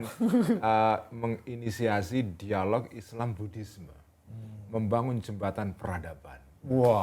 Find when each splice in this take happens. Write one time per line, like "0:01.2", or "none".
none